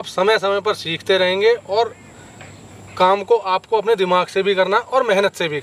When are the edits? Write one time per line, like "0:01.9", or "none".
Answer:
none

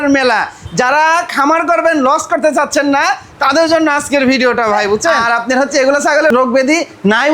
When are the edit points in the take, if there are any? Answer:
0:05.2
0:06.3

